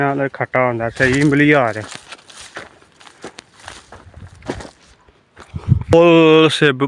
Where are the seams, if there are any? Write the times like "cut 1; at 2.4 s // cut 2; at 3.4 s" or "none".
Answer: cut 1; at 5.9 s

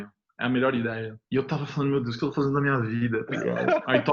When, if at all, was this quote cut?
cut 1; at 1.1 s

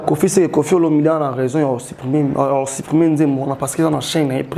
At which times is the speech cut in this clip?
none

